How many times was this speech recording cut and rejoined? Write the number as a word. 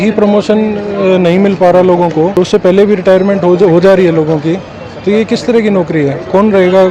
one